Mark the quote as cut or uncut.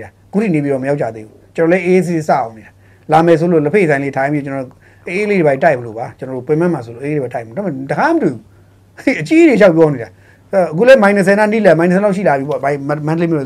uncut